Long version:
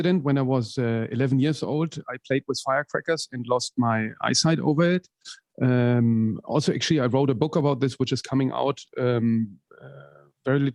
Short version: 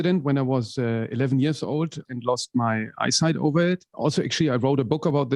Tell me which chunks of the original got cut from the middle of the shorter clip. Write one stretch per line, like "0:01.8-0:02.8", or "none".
0:02.1-0:03.3
0:05.1-0:06.4